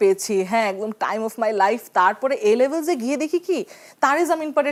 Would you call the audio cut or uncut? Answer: uncut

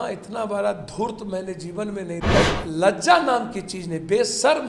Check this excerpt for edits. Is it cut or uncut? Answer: cut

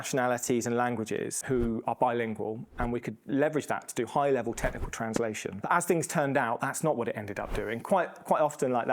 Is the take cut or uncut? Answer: cut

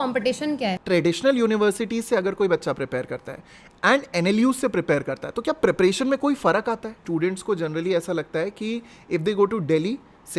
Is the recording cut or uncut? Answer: cut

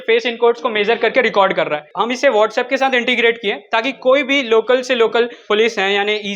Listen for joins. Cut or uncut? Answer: cut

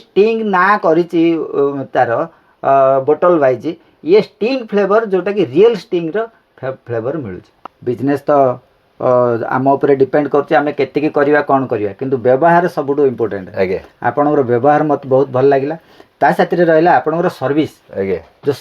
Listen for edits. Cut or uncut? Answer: cut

